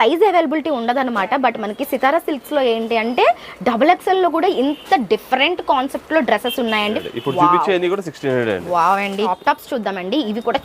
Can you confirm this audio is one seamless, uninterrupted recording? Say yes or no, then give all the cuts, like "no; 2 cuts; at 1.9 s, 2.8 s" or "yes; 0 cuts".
no; 2 cuts; at 7.0 s, 9.3 s